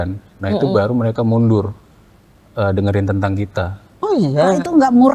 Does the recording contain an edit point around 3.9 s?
yes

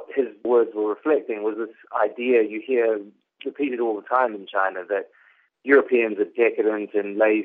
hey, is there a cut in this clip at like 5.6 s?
no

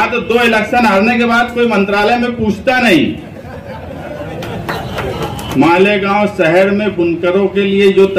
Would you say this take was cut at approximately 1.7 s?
no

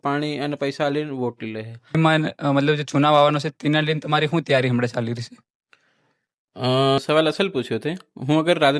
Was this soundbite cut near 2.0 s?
yes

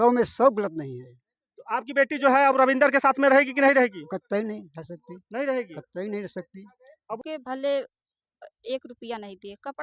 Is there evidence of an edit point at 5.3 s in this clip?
no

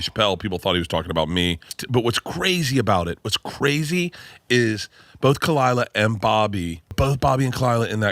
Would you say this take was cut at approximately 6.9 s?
yes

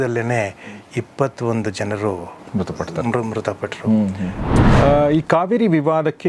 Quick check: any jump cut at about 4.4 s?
yes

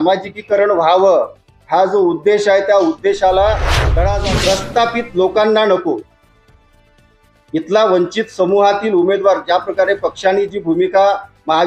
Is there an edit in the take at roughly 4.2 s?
yes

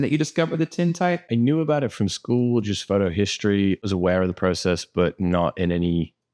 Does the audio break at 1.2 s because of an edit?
yes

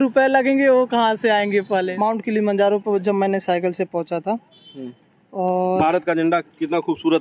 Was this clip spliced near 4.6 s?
no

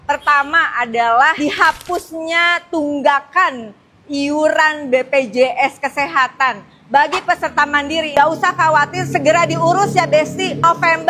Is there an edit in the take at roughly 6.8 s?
no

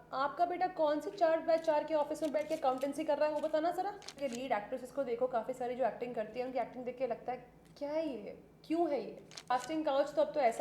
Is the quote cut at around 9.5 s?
yes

